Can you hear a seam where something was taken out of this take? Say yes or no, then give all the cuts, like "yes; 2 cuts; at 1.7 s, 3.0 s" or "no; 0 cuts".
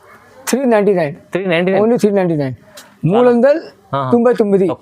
no; 0 cuts